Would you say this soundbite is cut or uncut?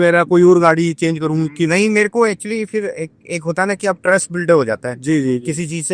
uncut